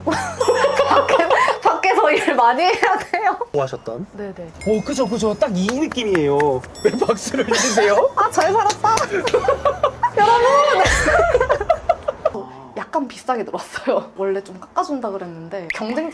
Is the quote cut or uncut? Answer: cut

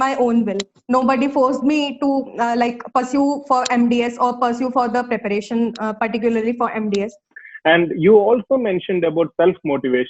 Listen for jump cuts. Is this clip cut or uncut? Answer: cut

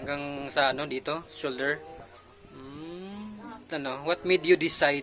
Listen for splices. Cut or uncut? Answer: cut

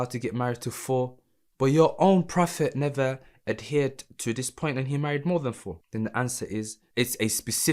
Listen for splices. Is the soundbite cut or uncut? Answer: cut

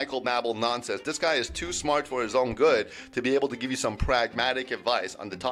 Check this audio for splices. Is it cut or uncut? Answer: uncut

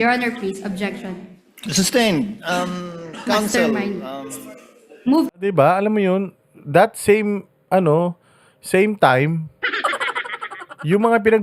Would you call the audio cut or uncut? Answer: uncut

